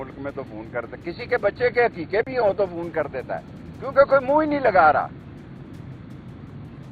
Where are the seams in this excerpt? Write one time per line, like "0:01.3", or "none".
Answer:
none